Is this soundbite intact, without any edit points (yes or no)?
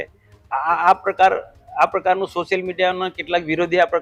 yes